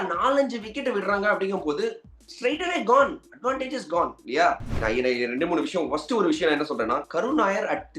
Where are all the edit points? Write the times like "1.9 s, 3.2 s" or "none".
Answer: 4.7 s